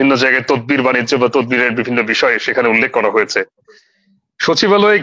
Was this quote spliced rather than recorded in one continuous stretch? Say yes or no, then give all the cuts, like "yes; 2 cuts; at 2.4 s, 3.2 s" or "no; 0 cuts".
no; 0 cuts